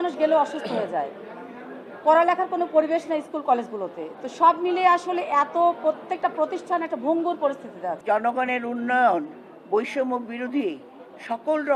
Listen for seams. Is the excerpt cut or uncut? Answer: cut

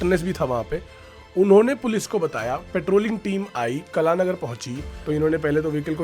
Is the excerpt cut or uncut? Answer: cut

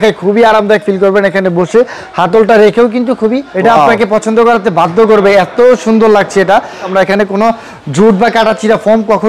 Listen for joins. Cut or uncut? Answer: cut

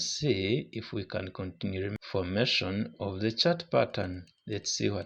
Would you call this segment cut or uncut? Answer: cut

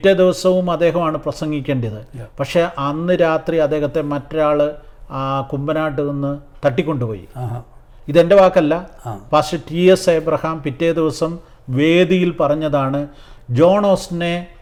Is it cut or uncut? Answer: uncut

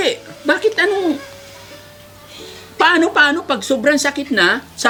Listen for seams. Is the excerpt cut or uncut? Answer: uncut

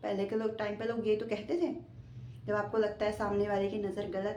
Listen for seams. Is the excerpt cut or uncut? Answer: uncut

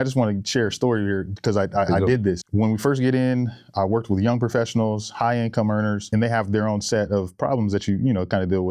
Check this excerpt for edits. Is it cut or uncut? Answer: cut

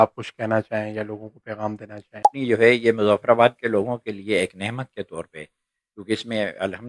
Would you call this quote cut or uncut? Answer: cut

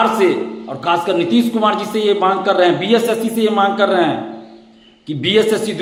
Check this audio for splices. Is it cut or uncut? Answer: uncut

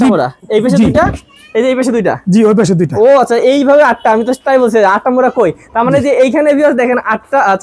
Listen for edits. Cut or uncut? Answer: uncut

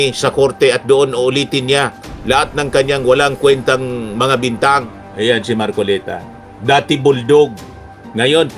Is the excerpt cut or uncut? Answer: cut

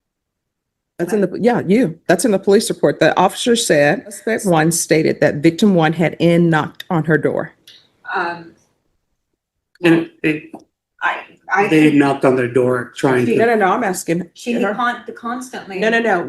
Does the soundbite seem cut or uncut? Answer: cut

